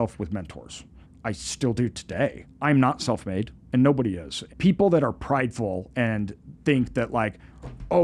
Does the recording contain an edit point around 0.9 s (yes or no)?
no